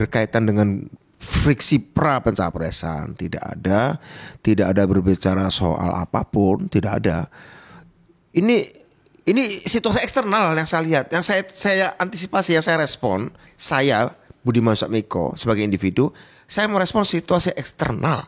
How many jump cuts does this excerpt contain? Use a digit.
0